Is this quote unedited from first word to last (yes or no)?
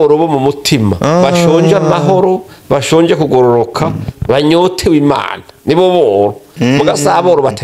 yes